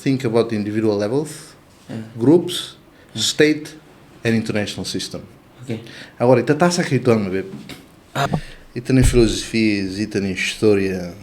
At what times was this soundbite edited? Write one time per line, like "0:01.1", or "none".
0:08.3

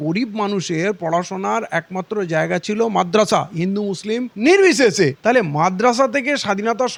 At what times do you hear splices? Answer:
none

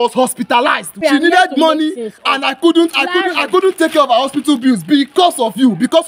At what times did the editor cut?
0:01.0

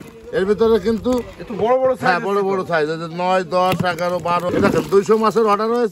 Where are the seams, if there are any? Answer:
0:04.5

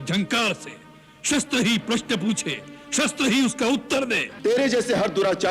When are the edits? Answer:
0:04.3

